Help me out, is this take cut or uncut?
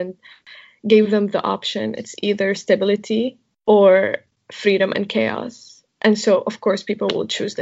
uncut